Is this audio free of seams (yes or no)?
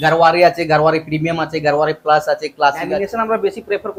no